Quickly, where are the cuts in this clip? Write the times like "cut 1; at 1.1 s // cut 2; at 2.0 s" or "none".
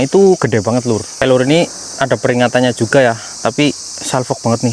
cut 1; at 1.1 s